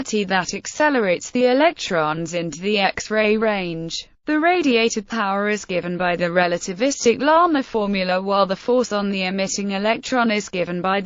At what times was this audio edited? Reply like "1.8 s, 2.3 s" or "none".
7.2 s